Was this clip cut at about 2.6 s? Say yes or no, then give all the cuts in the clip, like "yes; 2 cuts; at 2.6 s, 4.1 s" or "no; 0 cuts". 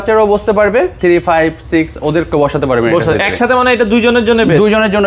no; 1 cut; at 0.9 s